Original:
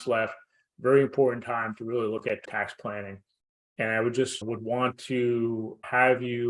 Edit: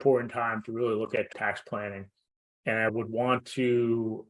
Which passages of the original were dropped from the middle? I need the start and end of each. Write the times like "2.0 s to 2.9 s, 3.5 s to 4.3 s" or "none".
4.0 s to 4.4 s